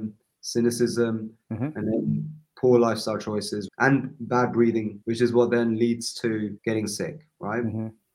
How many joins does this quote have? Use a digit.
3